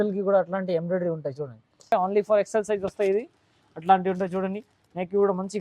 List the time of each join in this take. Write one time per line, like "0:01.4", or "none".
0:01.9